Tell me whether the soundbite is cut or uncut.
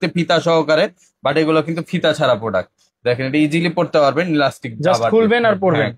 uncut